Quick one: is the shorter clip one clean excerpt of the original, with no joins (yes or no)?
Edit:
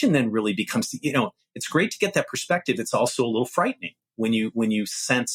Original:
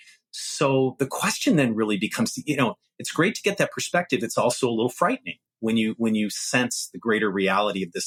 yes